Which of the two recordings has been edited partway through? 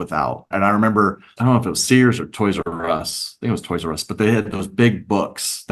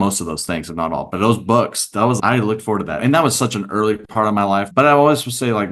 second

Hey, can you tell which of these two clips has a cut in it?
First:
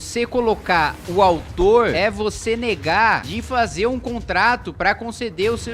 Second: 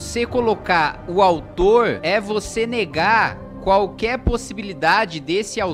first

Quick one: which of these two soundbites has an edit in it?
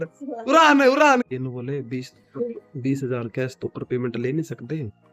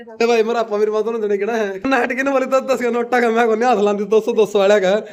first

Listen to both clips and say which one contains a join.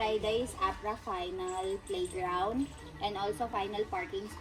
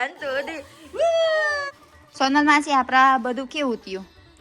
second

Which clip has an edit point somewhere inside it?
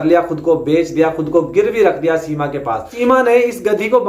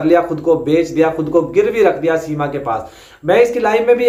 first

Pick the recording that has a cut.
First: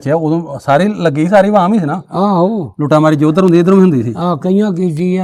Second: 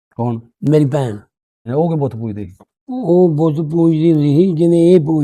second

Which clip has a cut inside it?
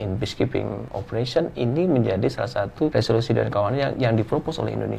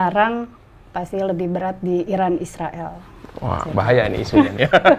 first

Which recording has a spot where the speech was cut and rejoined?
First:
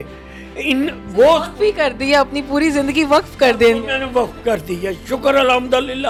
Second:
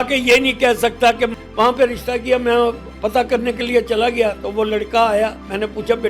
second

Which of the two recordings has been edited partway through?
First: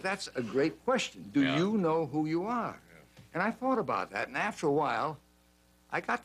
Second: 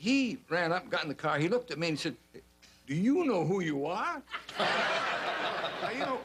second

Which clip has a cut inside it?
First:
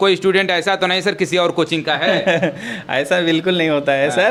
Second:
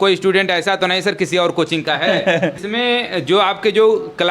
second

